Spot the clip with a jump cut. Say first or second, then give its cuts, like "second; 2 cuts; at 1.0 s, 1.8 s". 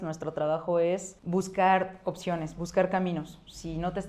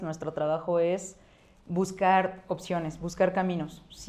first; 1 cut; at 1.1 s